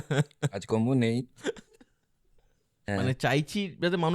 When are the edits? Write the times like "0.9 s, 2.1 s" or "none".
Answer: 2.8 s